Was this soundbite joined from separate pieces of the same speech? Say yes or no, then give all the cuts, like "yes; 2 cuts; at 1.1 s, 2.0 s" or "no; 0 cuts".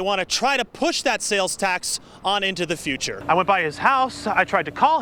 yes; 1 cut; at 3.1 s